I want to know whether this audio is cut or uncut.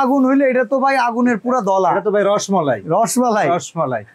uncut